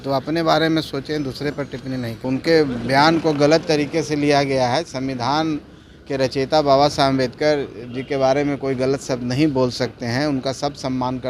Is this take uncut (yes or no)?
no